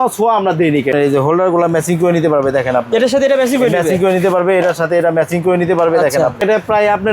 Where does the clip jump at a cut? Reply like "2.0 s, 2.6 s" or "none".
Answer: 0.9 s, 6.4 s